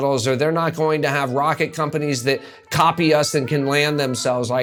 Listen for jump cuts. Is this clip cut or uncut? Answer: uncut